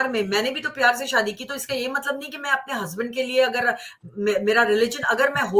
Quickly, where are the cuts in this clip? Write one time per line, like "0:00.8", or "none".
none